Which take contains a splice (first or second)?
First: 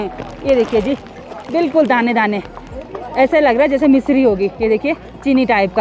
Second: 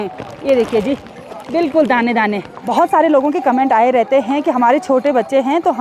second